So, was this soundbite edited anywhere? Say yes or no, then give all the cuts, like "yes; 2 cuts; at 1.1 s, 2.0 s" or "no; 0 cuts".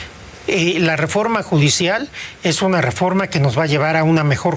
no; 0 cuts